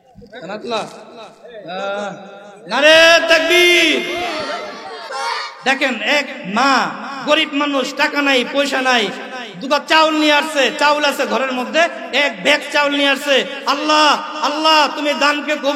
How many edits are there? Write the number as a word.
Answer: one